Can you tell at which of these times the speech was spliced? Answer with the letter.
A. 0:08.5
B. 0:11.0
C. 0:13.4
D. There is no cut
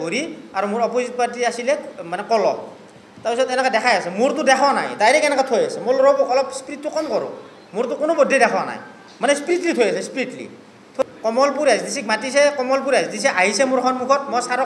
B